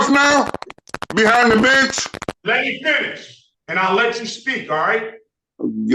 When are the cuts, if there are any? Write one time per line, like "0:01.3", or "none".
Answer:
0:02.3

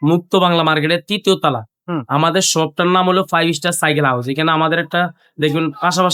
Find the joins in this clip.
none

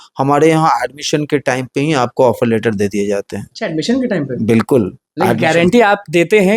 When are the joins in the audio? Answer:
none

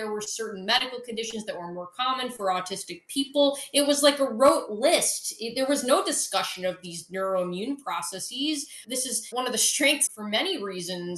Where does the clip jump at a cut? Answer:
0:08.8

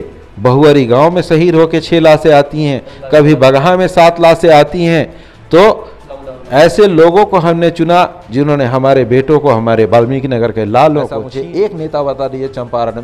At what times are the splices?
0:11.2

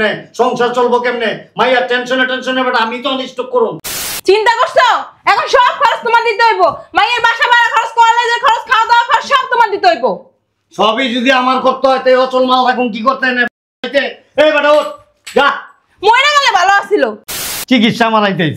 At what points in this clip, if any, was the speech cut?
0:03.9
0:17.5

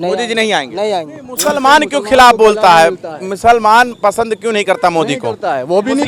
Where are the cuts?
0:01.2

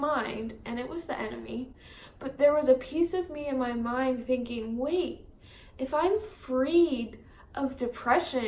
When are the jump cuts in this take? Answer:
none

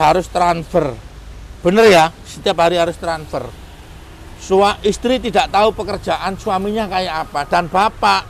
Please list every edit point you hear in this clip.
none

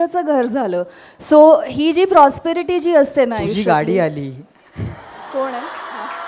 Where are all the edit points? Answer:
none

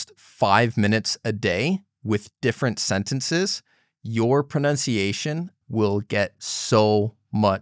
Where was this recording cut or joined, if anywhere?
0:05.5

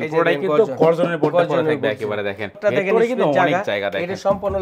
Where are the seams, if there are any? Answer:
0:02.5

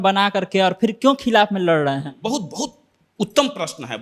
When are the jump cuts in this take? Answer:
none

